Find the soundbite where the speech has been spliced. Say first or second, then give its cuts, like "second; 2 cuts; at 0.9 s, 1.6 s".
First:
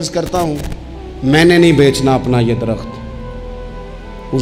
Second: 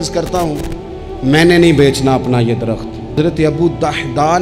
second; 1 cut; at 3.2 s